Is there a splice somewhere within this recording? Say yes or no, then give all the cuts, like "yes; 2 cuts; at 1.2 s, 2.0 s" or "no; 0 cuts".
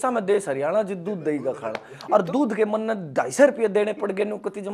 no; 0 cuts